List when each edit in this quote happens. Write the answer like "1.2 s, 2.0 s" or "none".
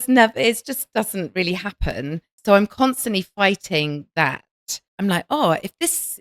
2.4 s